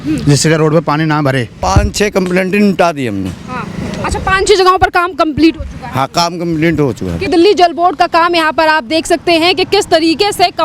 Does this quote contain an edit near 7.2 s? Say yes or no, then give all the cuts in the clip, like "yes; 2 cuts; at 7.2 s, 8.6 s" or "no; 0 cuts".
yes; 2 cuts; at 1.5 s, 7.2 s